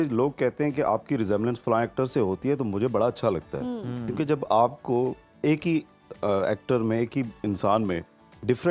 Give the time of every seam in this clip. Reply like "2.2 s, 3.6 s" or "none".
none